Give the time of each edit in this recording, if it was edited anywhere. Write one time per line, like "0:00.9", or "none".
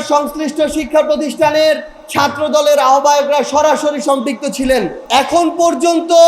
0:02.0
0:05.0

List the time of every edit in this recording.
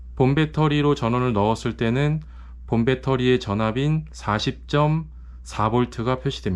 none

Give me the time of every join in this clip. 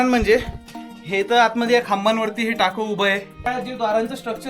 0:03.5

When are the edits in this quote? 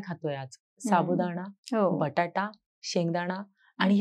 none

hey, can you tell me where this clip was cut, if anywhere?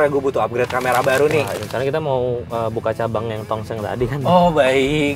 0:01.5

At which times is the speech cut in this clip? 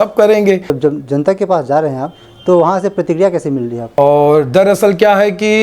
0:00.8
0:03.8

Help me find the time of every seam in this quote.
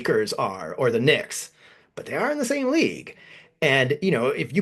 none

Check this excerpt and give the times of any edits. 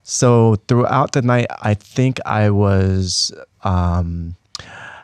none

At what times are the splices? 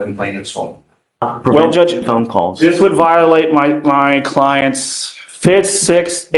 0:01.3

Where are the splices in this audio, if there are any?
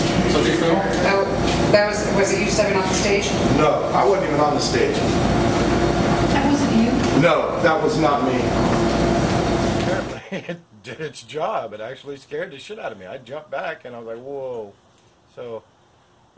0:10.0

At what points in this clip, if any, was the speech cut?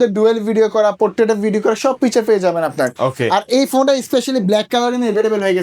none

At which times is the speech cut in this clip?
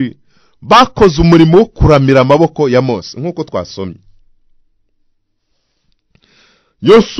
none

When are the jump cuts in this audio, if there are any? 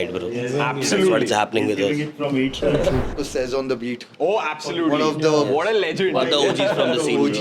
0:03.2

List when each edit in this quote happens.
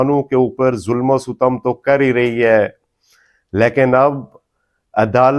none

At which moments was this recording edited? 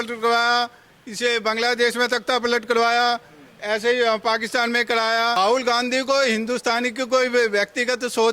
0:05.4

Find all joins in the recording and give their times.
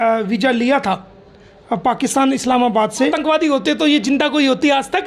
0:03.2

